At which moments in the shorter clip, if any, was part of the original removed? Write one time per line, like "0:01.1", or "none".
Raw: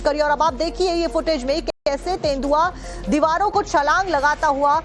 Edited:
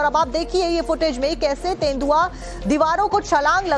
0:01.4